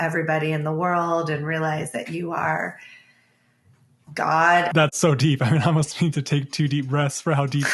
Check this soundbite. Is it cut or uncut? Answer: cut